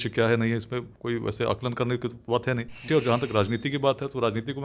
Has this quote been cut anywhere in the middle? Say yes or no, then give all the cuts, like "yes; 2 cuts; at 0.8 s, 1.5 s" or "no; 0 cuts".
yes; 1 cut; at 2.9 s